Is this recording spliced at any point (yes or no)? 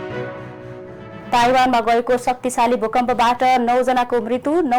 yes